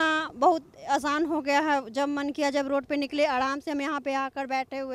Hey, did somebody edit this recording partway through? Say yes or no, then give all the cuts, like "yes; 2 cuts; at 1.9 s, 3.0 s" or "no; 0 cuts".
no; 0 cuts